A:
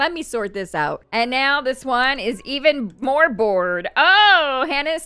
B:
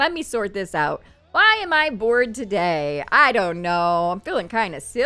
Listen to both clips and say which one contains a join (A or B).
A